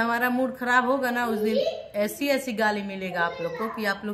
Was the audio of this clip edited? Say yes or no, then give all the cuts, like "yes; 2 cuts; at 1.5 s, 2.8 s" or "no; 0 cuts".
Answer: no; 0 cuts